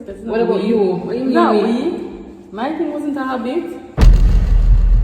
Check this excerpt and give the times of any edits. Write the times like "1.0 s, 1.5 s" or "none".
none